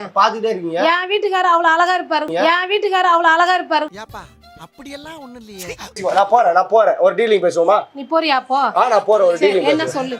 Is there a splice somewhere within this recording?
yes; 1 cut; at 6.0 s

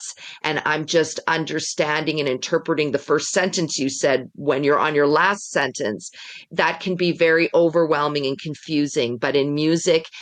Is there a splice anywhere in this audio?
no; 0 cuts

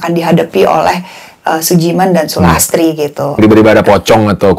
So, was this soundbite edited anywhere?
yes; 1 cut; at 3.4 s

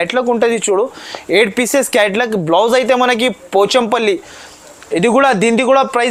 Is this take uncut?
yes; 0 cuts

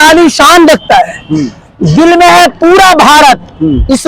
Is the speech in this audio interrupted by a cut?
no; 0 cuts

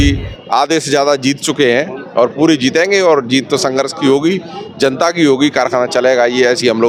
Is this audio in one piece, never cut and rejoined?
yes; 0 cuts

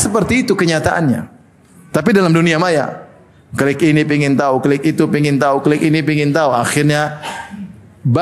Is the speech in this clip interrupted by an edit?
no; 0 cuts

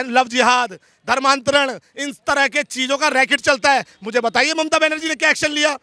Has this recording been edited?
no; 0 cuts

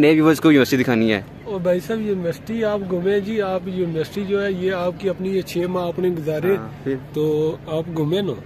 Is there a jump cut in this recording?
no; 0 cuts

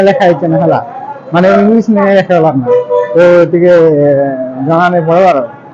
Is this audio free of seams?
yes; 0 cuts

